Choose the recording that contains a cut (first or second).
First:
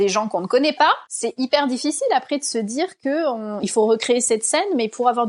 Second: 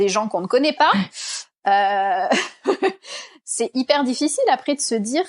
first